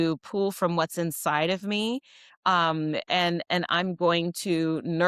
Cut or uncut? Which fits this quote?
uncut